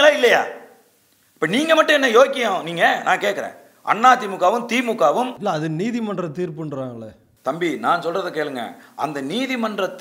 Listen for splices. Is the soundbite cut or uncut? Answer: uncut